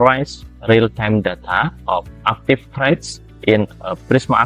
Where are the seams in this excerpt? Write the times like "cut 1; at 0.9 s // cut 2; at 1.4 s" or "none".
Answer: none